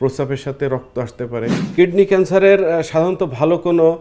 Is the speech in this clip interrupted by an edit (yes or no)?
yes